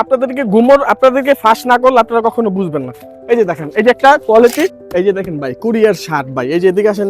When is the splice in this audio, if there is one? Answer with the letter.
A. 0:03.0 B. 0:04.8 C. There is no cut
B